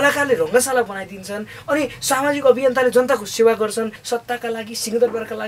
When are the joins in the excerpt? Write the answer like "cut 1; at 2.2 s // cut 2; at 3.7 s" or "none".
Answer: cut 1; at 4.0 s